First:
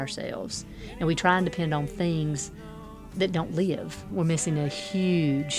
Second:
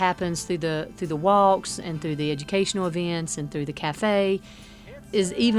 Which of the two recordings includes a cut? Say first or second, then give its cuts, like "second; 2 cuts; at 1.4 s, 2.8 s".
first; 1 cut; at 4.0 s